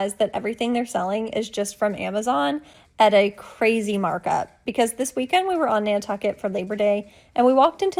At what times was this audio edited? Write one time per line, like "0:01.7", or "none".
none